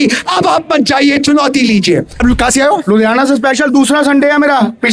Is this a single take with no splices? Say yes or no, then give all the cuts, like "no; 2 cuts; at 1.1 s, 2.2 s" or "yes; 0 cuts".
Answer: no; 1 cut; at 2.1 s